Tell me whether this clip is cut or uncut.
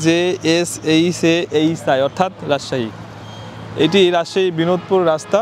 uncut